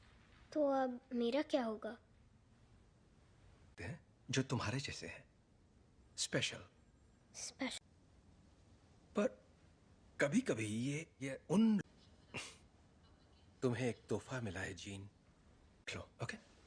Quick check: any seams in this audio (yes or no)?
no